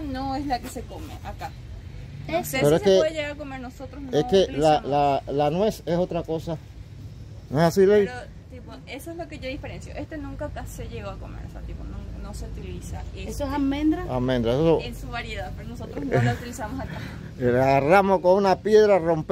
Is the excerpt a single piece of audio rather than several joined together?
yes; 0 cuts

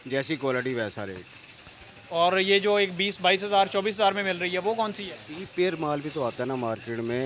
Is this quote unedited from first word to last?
yes; 0 cuts

